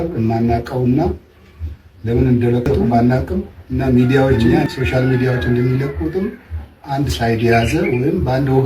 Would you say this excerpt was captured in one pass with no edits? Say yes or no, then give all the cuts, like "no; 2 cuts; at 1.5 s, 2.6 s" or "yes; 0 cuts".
no; 1 cut; at 3.6 s